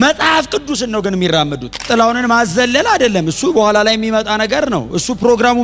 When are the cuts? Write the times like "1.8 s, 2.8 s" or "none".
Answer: 1.8 s